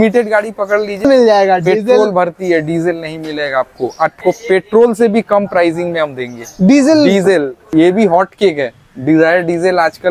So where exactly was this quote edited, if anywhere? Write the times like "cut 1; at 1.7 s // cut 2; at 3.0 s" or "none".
cut 1; at 1.0 s // cut 2; at 4.2 s // cut 3; at 7.6 s